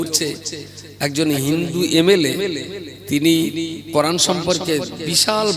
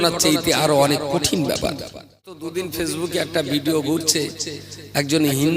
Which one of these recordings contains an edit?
second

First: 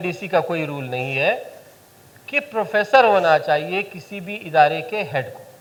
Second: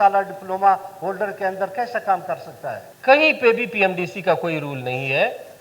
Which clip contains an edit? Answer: second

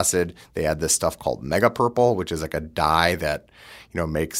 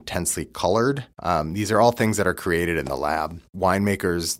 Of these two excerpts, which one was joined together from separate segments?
second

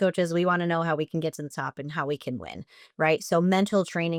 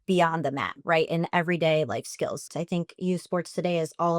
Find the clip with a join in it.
second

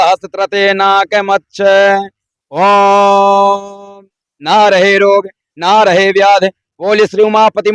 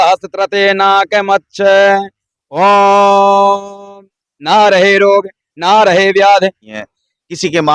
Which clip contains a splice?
second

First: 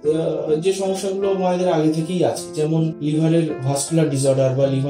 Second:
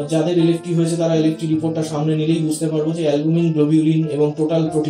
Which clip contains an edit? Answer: first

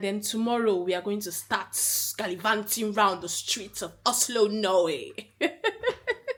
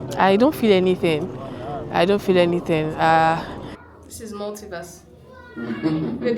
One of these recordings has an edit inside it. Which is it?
second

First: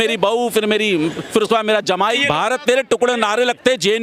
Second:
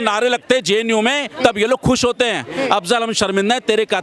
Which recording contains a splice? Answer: first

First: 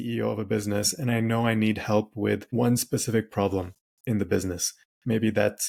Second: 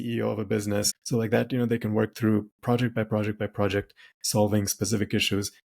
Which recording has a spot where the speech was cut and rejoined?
second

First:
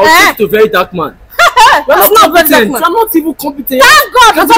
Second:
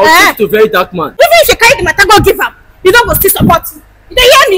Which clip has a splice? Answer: second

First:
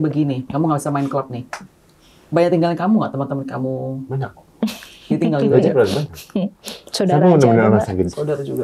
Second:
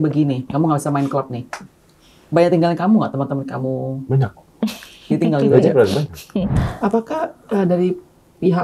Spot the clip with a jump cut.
second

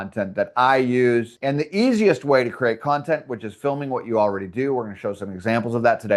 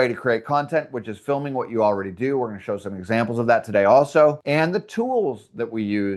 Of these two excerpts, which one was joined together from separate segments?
first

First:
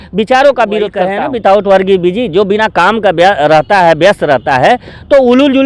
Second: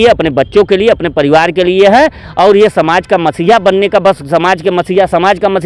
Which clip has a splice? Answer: first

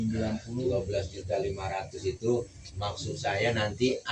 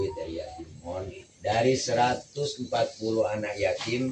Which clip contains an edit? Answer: second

